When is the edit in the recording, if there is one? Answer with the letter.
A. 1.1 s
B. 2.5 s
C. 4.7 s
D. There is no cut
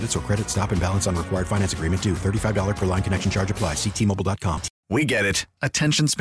C